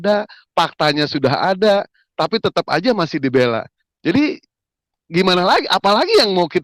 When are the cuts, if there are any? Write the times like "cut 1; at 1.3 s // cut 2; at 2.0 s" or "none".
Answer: none